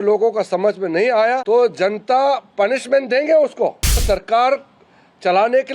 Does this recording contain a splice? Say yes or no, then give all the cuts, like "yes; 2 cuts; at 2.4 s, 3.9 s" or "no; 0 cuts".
yes; 2 cuts; at 1.4 s, 4.0 s